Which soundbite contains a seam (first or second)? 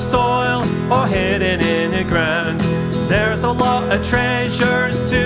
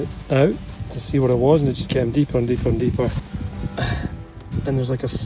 second